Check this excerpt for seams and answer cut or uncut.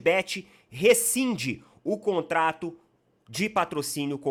uncut